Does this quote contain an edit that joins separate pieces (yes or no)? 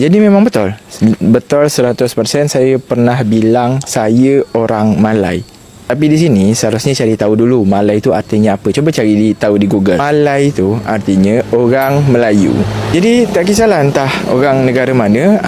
no